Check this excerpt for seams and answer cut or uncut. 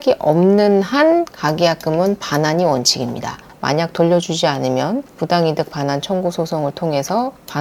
cut